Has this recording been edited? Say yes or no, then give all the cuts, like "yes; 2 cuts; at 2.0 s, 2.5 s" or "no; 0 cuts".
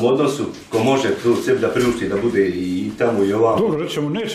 no; 0 cuts